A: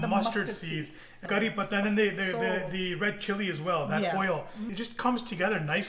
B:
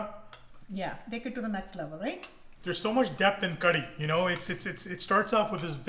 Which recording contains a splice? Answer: A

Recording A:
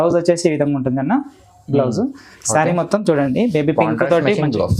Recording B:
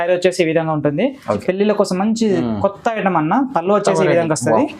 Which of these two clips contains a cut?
B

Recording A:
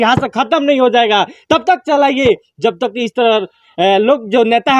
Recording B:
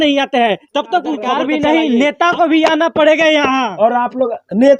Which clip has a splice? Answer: B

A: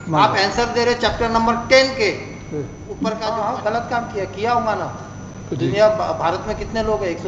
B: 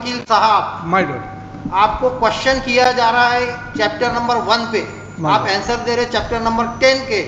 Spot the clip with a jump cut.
A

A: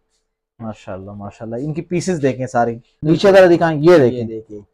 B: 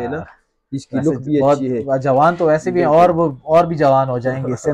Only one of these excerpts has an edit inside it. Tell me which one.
A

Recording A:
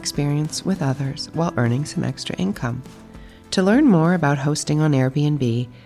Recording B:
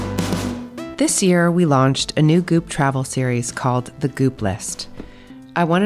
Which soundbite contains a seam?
B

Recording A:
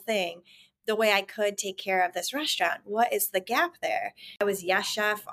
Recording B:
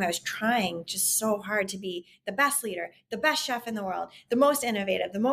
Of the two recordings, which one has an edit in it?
A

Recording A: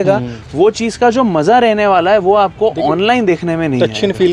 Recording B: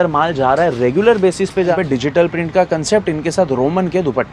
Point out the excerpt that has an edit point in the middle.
B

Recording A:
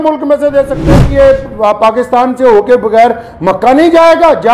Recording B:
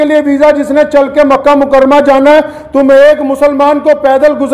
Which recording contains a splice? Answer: A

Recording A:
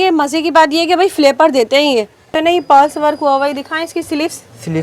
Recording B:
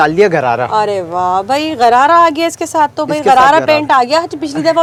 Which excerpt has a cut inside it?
A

